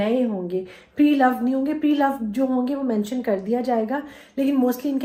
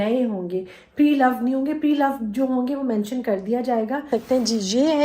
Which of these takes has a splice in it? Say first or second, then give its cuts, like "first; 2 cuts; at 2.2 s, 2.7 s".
second; 1 cut; at 4.1 s